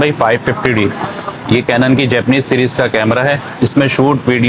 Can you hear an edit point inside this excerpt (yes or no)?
no